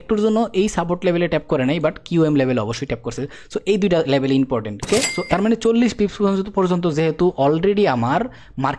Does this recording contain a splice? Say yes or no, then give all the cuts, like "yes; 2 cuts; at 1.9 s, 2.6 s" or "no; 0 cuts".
yes; 1 cut; at 4.8 s